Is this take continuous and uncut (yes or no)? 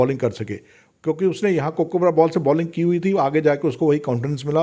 yes